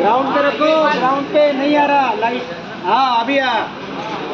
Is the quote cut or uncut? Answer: uncut